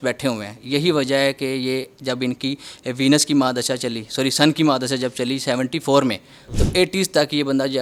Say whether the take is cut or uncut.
uncut